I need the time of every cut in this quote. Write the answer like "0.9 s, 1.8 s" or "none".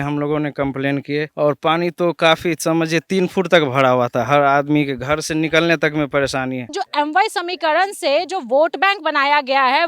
6.7 s